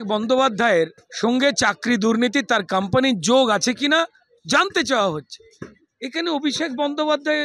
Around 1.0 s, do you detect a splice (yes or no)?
yes